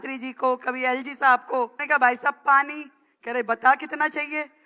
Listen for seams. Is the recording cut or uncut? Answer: cut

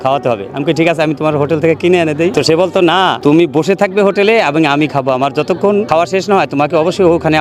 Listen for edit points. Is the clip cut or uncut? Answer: cut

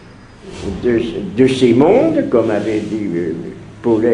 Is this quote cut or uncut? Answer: cut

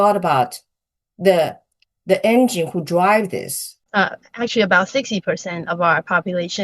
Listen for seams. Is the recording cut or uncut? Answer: cut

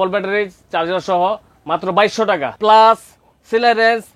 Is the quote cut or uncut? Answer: cut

